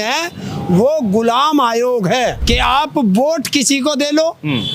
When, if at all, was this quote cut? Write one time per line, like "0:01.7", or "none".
0:02.4

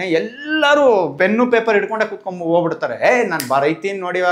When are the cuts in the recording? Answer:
0:01.2

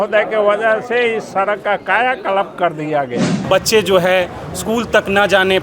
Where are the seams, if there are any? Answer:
0:03.3

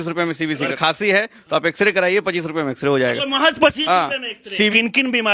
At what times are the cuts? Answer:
0:00.8
0:04.3

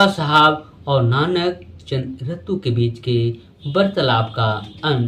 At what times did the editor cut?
none

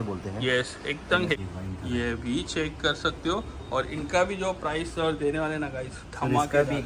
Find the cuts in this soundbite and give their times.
0:01.3

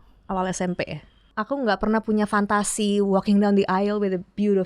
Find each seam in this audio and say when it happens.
0:01.3

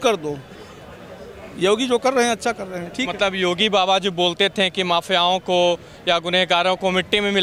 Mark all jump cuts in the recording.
none

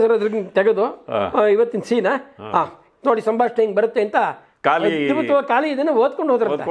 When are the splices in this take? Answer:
0:04.4

